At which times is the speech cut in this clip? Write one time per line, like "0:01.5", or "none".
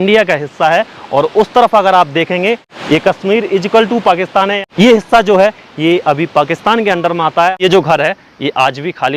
0:02.7
0:04.6
0:07.6